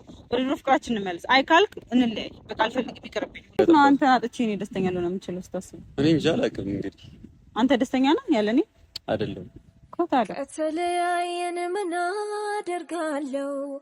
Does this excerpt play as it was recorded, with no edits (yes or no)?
no